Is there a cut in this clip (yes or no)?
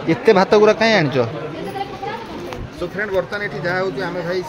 no